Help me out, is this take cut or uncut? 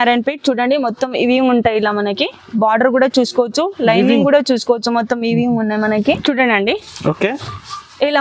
cut